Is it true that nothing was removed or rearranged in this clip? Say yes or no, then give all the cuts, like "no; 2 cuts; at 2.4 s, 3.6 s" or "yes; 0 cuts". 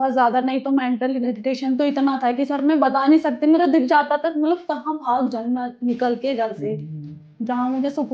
yes; 0 cuts